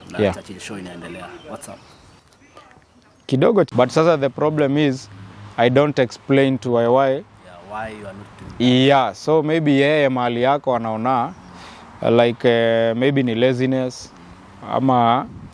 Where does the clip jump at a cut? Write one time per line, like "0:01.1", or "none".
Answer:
0:03.7